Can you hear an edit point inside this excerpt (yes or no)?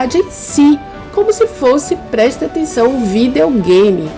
no